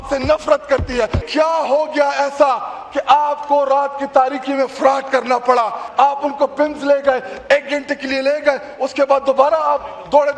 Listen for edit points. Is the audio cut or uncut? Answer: cut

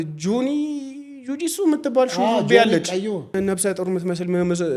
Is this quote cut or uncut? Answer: cut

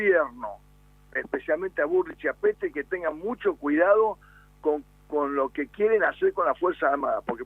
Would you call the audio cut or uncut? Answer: cut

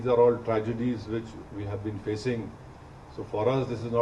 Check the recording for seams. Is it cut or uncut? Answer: uncut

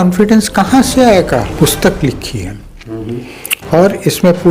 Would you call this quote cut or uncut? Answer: cut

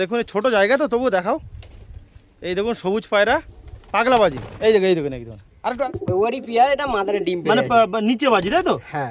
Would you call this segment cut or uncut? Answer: cut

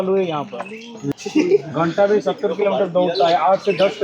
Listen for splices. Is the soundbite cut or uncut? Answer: cut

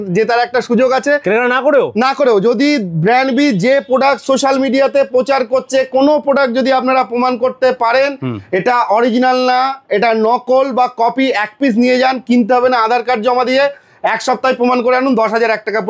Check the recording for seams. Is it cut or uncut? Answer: uncut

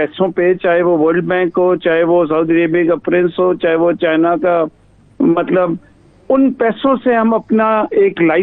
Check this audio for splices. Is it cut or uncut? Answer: uncut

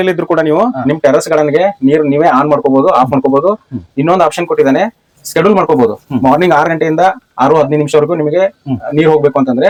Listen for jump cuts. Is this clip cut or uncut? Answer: uncut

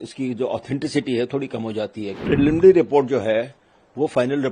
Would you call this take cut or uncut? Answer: cut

